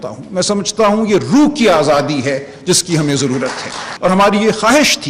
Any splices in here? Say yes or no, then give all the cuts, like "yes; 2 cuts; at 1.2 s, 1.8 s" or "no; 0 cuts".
yes; 1 cut; at 3.8 s